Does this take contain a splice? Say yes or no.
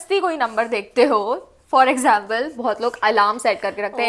no